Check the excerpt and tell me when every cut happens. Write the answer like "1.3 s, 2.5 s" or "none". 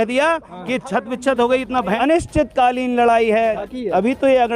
2.0 s, 3.6 s